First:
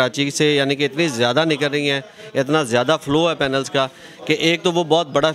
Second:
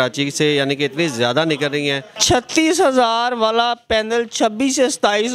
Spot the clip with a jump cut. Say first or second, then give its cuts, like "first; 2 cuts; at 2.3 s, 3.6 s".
second; 1 cut; at 2.2 s